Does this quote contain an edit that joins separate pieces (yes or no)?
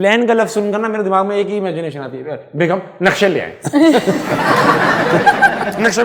no